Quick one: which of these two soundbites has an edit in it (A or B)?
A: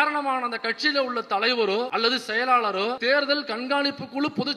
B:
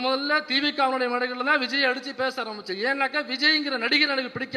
A